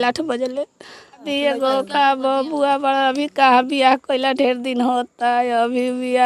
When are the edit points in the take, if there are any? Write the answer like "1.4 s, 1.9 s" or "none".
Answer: 1.3 s